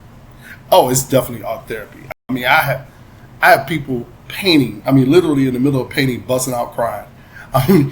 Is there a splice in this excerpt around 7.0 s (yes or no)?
no